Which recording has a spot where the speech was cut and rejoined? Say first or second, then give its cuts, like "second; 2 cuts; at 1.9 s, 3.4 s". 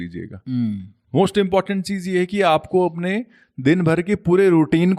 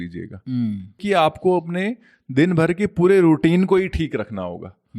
second; 1 cut; at 1.0 s